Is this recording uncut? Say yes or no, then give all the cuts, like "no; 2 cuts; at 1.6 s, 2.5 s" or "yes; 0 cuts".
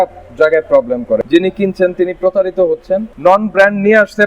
no; 2 cuts; at 1.2 s, 3.1 s